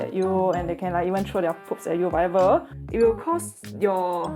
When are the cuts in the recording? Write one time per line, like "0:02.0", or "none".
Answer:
0:02.7